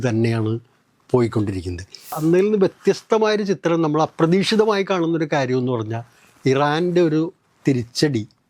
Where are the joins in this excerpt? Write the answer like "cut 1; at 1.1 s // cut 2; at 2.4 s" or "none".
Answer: cut 1; at 2.2 s